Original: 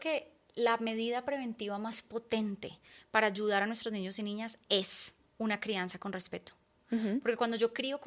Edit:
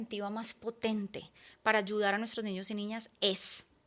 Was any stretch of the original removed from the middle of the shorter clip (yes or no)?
no